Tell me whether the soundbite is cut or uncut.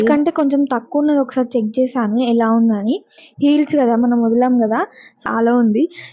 cut